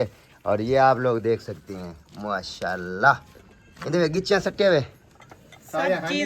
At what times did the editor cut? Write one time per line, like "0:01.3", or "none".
none

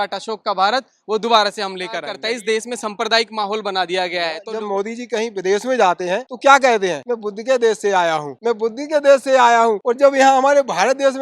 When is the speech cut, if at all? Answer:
0:02.2
0:04.4
0:06.3
0:07.1
0:08.3
0:09.8

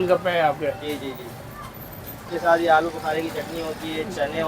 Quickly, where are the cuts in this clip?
0:02.3

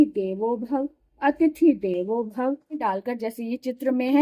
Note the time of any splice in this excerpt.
0:02.8

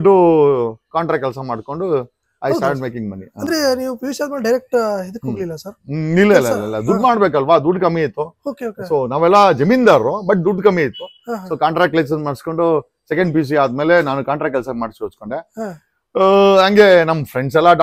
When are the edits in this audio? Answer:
none

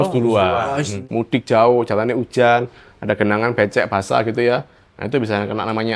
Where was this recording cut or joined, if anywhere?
0:01.0

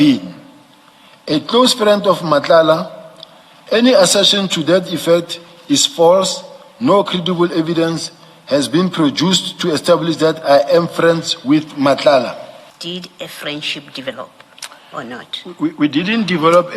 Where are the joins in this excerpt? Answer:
0:12.7

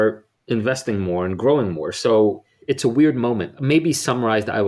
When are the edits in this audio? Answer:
0:02.6
0:03.6

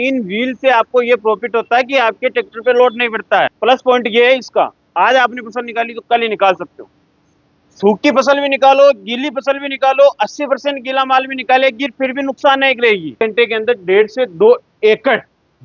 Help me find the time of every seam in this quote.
0:03.5
0:13.2

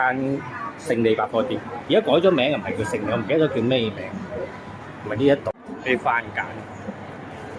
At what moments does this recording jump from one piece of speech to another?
0:05.5

